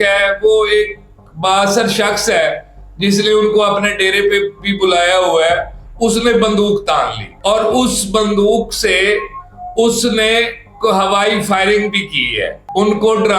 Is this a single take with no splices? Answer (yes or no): yes